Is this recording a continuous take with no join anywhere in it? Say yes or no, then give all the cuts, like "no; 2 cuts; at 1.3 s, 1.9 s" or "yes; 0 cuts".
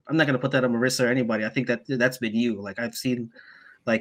yes; 0 cuts